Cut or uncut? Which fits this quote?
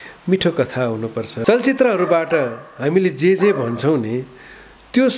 cut